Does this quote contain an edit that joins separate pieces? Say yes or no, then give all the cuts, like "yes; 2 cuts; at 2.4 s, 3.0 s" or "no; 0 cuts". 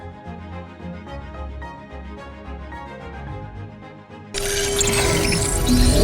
yes; 1 cut; at 4.3 s